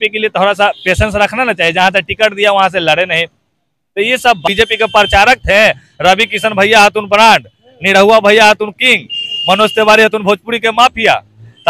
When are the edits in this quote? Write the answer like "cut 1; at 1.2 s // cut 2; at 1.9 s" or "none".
cut 1; at 4.4 s

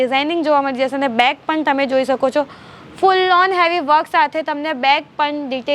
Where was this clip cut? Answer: none

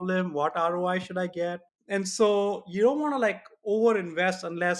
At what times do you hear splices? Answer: cut 1; at 1.7 s

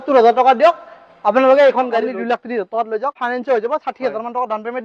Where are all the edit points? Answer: cut 1; at 2.0 s // cut 2; at 3.2 s

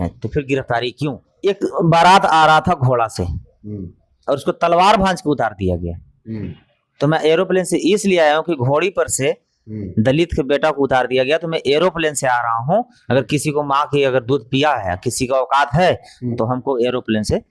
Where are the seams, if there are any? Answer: cut 1; at 1.2 s

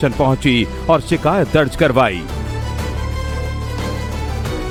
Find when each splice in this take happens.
none

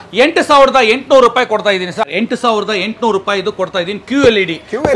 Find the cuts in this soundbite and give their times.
cut 1; at 2.1 s

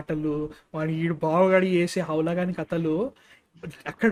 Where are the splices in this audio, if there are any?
none

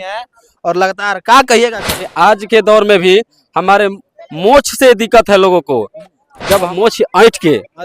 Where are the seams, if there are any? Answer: cut 1; at 2.1 s // cut 2; at 6.7 s

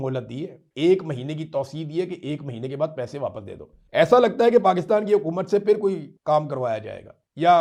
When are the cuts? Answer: none

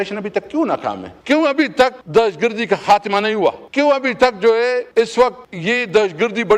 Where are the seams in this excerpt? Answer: cut 1; at 1.1 s // cut 2; at 2.0 s // cut 3; at 3.6 s // cut 4; at 4.9 s // cut 5; at 5.5 s

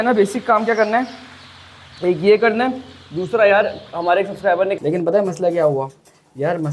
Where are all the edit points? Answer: cut 1; at 4.7 s

